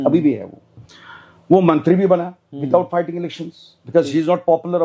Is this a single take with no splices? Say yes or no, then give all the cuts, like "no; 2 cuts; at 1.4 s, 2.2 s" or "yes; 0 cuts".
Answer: yes; 0 cuts